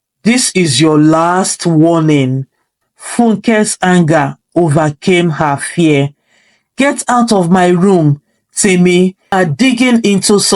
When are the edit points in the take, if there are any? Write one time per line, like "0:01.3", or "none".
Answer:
0:09.3